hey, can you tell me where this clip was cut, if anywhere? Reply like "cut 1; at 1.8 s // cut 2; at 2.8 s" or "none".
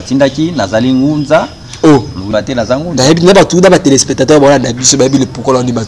cut 1; at 2.3 s

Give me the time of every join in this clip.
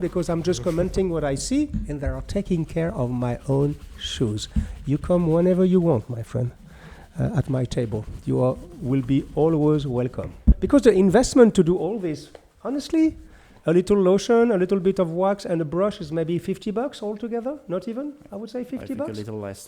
cut 1; at 10.6 s

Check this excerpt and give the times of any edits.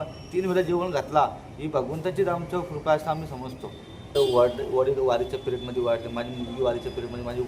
cut 1; at 4.2 s

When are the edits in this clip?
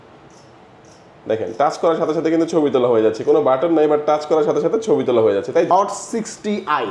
cut 1; at 5.7 s

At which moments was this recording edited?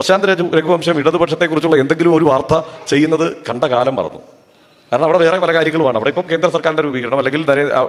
none

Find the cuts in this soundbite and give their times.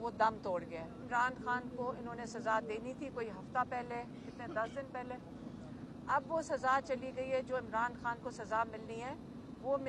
cut 1; at 1.1 s

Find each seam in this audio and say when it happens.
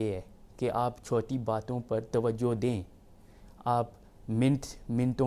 none

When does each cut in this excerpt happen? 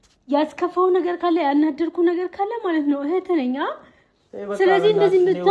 none

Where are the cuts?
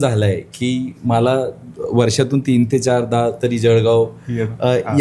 none

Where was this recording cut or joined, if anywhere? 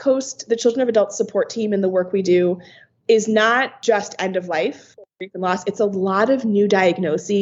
cut 1; at 3.7 s // cut 2; at 5.0 s

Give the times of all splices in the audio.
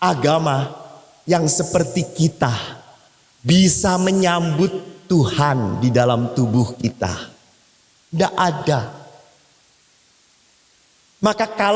none

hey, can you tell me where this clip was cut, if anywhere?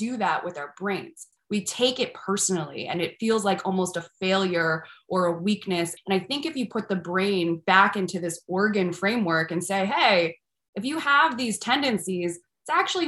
cut 1; at 5.9 s

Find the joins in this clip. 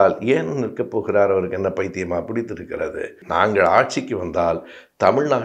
cut 1; at 3.2 s

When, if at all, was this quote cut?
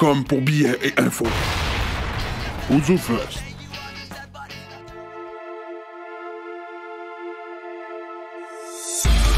cut 1; at 4.7 s

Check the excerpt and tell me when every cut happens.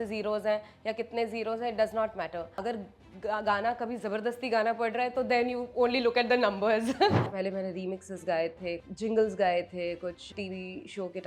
cut 1; at 2.6 s // cut 2; at 7.3 s // cut 3; at 8.8 s // cut 4; at 10.3 s

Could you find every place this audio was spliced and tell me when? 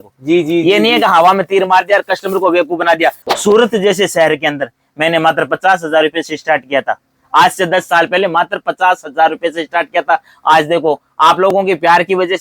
cut 1; at 3.3 s

